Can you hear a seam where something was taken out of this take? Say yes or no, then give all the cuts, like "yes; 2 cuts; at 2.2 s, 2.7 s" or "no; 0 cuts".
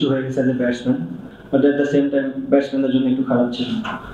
yes; 1 cut; at 1.2 s